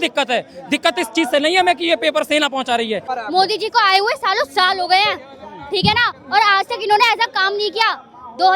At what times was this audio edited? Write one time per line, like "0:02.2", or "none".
0:03.1